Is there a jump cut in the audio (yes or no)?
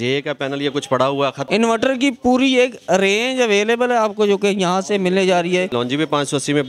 yes